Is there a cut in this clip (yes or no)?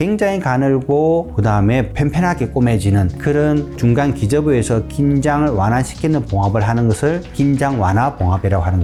no